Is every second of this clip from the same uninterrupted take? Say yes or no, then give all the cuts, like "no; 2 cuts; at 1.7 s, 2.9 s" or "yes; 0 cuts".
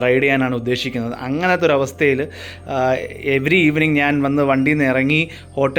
yes; 0 cuts